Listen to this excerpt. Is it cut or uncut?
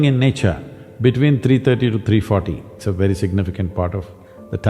cut